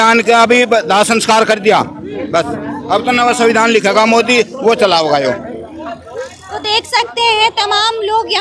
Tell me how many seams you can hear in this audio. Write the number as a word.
zero